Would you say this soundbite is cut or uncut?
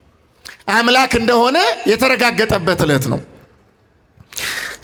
uncut